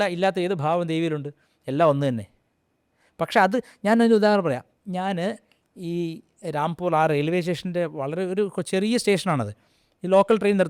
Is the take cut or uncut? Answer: uncut